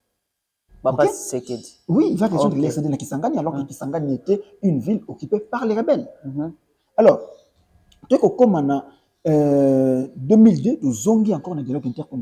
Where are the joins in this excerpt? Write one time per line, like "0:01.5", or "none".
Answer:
none